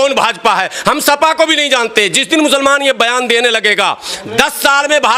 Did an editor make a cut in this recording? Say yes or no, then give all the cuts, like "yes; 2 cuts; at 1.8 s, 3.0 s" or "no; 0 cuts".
no; 0 cuts